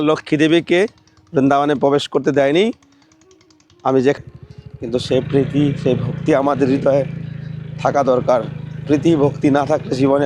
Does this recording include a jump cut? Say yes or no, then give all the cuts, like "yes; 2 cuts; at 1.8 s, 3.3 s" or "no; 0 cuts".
yes; 1 cut; at 4.2 s